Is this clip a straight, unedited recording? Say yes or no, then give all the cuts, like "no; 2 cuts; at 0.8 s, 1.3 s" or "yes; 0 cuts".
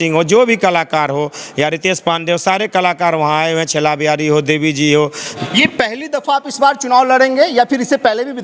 no; 1 cut; at 5.3 s